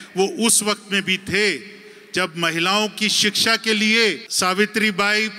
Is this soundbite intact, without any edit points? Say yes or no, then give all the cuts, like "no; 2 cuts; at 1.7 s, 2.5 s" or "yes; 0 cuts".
no; 1 cut; at 4.3 s